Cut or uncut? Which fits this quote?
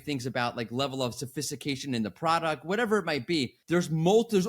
uncut